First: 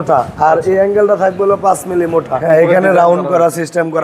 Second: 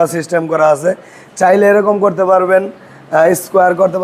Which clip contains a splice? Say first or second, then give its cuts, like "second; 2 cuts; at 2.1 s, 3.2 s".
first; 1 cut; at 2.4 s